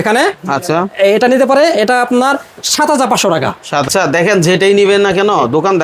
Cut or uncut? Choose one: cut